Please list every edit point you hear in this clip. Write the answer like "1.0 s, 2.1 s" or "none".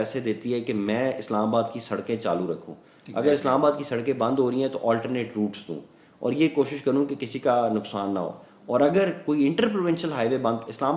none